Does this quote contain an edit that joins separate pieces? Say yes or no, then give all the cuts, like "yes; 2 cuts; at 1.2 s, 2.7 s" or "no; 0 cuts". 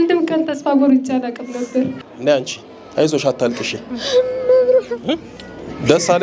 yes; 1 cut; at 2.0 s